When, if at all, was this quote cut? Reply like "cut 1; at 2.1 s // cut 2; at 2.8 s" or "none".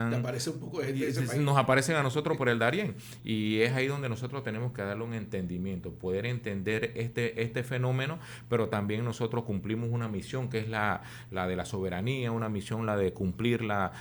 none